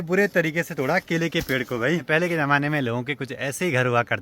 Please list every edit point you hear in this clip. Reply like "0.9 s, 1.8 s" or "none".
2.1 s

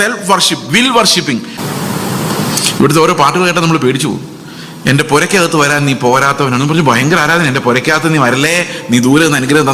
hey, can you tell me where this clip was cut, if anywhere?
1.6 s

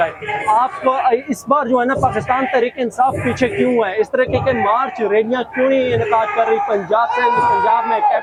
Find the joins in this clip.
none

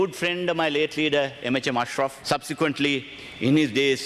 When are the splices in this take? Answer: none

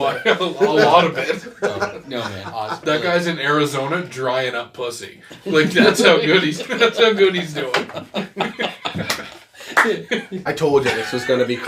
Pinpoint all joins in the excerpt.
10.4 s

